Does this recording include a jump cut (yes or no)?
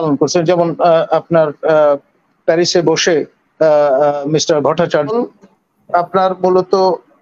yes